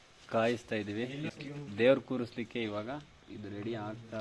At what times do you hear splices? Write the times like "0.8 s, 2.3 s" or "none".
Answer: none